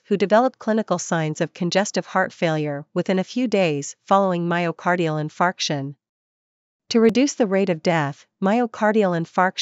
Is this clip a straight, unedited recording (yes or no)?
yes